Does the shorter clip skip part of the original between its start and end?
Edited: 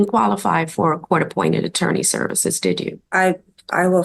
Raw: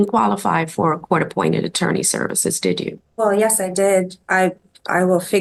yes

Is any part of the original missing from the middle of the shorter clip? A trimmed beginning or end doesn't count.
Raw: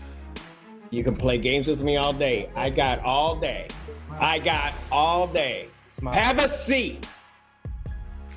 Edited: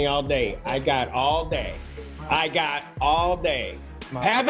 no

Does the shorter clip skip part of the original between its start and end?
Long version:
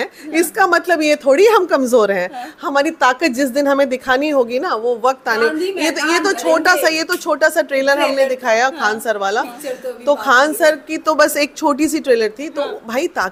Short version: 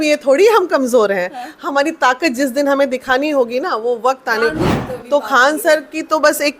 yes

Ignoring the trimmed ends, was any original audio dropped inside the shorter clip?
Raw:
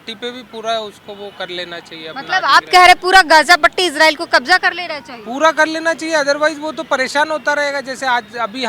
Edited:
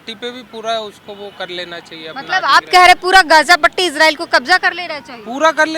no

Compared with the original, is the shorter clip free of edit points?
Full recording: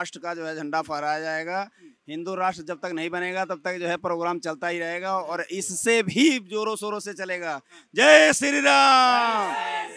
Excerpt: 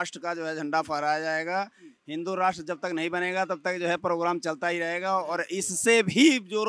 yes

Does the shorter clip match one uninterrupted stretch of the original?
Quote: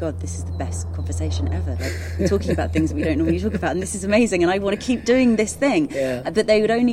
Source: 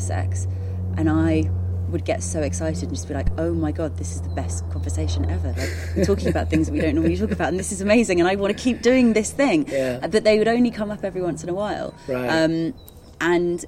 yes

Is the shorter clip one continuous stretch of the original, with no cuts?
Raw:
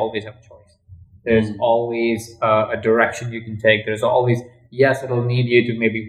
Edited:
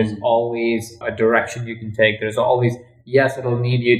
no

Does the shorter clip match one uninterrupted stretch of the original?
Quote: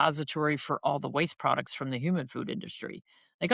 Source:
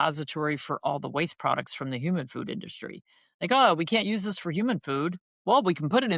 yes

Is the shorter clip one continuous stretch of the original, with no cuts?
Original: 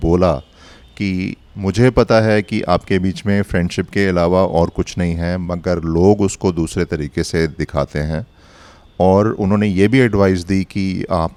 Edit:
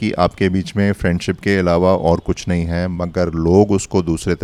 yes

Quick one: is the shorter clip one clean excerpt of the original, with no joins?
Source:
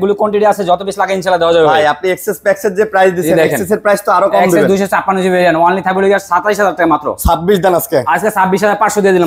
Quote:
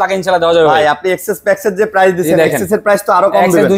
yes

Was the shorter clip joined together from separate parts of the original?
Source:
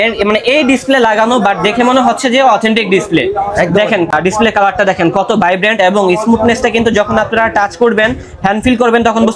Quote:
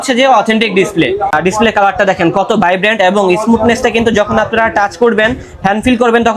yes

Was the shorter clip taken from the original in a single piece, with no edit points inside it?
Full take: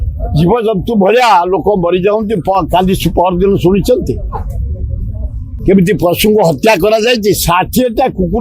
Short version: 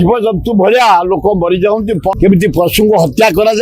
no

